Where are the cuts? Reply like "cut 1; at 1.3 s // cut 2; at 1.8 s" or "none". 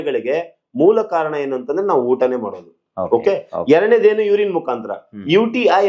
none